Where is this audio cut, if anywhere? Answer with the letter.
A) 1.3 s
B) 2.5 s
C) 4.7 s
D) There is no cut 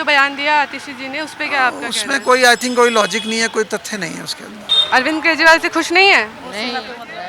C